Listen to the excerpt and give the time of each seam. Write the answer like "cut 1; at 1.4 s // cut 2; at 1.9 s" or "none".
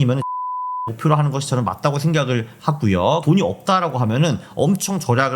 cut 1; at 3.2 s